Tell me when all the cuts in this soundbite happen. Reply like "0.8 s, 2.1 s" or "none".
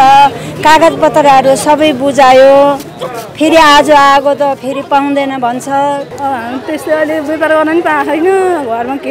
6.1 s

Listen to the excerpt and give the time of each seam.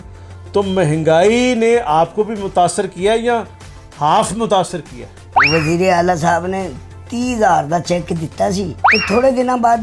5.3 s, 8.8 s

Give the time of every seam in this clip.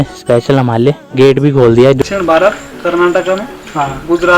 1.0 s, 2.0 s

